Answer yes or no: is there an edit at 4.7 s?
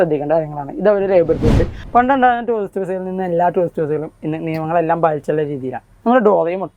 no